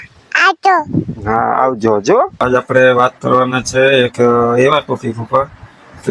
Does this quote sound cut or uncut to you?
cut